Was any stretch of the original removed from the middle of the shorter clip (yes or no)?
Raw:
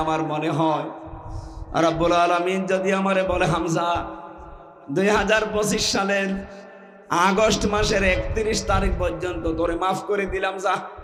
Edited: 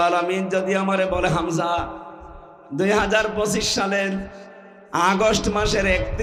no